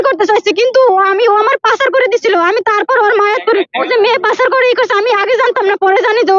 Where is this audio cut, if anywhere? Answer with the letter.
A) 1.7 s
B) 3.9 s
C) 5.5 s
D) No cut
B